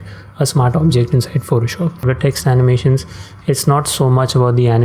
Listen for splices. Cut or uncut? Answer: cut